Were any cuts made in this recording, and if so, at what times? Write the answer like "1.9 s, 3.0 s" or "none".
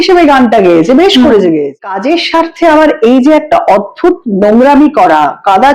1.9 s